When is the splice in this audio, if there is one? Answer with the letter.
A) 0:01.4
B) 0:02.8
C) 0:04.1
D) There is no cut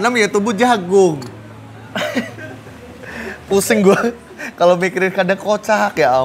D